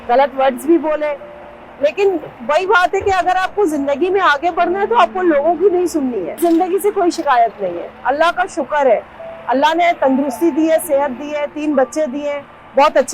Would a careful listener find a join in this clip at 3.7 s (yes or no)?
no